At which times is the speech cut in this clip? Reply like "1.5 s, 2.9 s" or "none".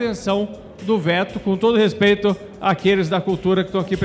none